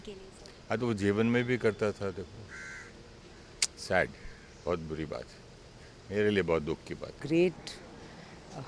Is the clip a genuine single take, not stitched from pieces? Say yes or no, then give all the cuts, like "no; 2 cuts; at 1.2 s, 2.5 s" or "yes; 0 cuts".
no; 1 cut; at 7.2 s